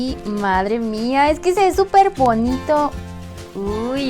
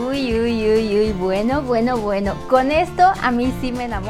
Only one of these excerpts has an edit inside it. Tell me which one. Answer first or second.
first